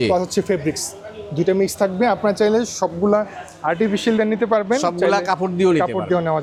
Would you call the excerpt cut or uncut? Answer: uncut